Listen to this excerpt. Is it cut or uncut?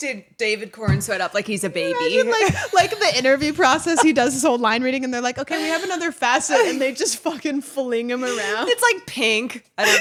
uncut